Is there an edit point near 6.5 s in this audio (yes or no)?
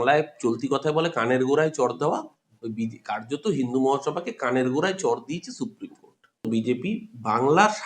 yes